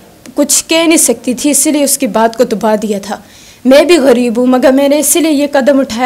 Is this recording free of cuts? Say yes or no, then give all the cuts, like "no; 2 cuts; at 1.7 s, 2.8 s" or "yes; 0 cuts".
yes; 0 cuts